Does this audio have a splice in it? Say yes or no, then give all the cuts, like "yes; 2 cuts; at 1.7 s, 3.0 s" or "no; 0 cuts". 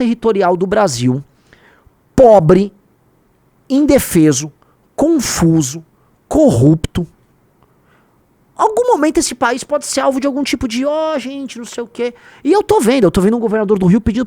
no; 0 cuts